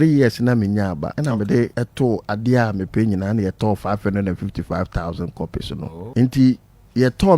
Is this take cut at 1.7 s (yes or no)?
yes